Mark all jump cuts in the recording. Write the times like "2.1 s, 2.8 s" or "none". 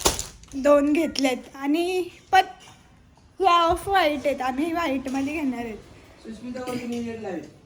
none